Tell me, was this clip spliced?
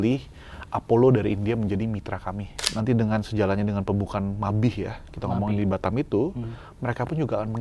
yes; 1 cut; at 2.6 s

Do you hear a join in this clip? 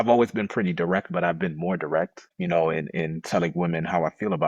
no; 0 cuts

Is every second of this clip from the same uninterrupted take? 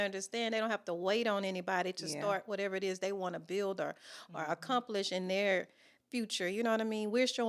yes; 0 cuts

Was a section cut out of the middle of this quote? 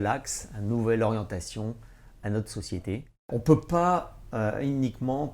yes; 1 cut; at 3.3 s

